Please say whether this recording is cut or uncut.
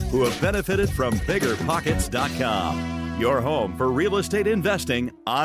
uncut